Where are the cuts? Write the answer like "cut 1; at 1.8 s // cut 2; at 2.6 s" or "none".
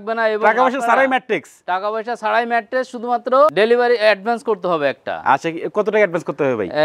none